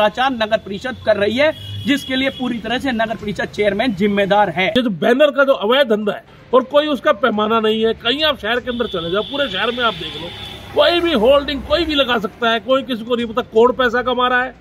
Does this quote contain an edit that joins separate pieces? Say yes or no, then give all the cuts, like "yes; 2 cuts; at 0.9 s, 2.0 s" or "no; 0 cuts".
yes; 2 cuts; at 4.7 s, 6.3 s